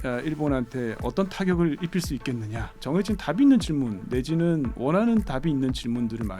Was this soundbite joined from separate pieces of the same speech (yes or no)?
yes